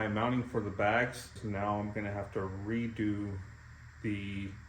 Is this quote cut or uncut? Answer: cut